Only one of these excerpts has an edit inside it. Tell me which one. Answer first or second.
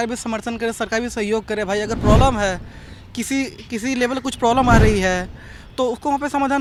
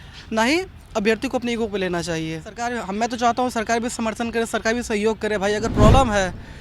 second